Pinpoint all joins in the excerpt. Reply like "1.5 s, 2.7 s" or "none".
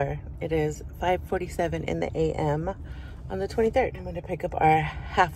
4.3 s